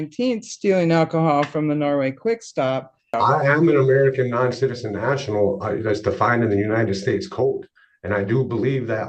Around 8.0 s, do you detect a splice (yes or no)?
no